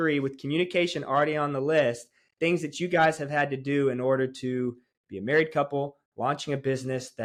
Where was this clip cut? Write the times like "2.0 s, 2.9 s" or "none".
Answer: none